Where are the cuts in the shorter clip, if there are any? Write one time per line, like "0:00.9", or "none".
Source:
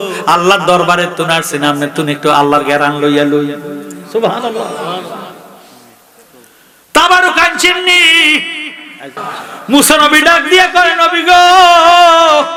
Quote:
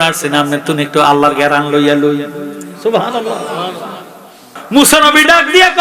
0:04.5